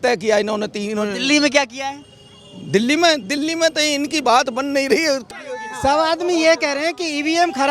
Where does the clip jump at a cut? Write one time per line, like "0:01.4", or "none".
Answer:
0:05.2